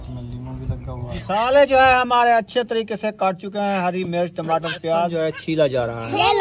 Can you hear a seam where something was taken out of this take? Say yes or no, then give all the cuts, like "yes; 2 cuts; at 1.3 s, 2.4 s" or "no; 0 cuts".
yes; 2 cuts; at 1.1 s, 5.2 s